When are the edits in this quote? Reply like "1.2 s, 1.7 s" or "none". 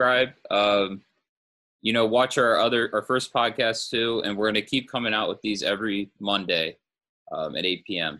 none